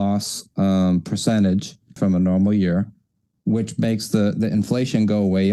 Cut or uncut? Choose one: cut